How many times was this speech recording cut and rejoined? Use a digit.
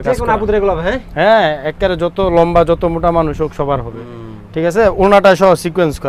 0